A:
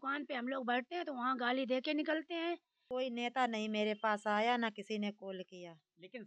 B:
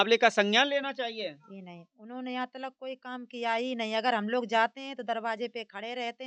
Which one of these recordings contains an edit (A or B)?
A